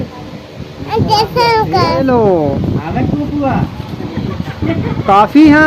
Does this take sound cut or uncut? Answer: cut